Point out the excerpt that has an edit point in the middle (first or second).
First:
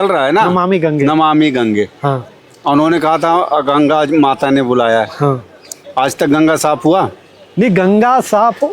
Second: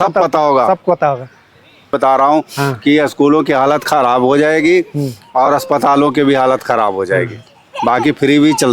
second